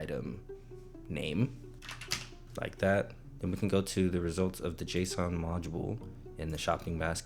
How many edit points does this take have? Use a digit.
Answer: 2